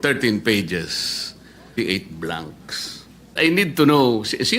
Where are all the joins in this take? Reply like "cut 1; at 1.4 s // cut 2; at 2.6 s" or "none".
cut 1; at 1.7 s // cut 2; at 3.4 s